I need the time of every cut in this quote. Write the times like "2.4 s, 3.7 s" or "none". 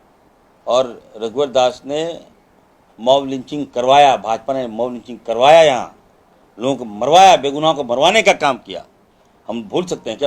none